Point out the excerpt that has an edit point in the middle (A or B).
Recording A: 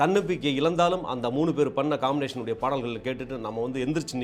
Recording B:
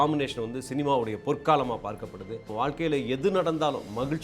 B